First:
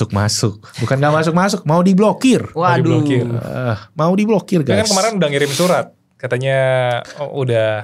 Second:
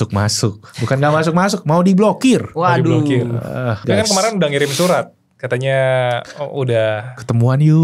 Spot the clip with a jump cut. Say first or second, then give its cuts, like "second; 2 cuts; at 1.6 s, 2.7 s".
second; 1 cut; at 3.8 s